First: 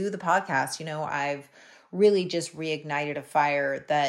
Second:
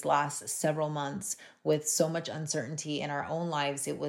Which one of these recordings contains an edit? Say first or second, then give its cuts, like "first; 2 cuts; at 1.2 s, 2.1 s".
first; 1 cut; at 1.5 s